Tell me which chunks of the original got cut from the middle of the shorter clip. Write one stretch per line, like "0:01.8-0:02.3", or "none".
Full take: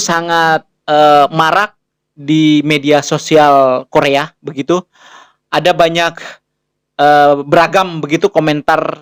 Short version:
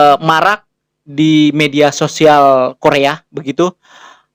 none